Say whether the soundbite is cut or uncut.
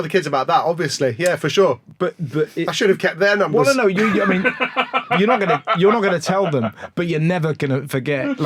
uncut